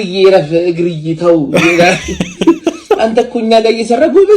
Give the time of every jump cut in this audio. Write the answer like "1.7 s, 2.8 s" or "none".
none